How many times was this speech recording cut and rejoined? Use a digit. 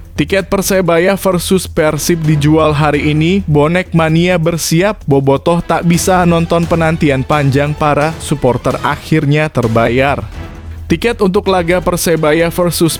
0